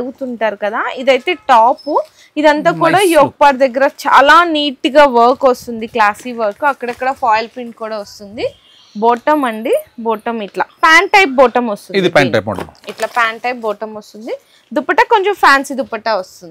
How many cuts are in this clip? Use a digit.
0